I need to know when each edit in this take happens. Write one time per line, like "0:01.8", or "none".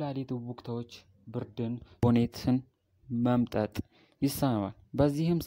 0:02.0